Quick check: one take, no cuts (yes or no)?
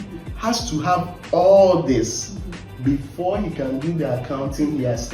yes